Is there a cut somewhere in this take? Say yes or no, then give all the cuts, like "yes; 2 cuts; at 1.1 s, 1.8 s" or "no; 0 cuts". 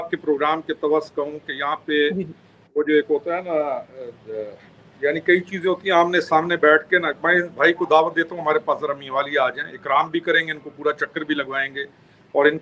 no; 0 cuts